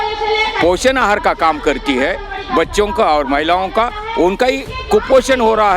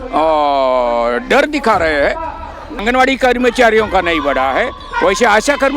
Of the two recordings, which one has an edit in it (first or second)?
second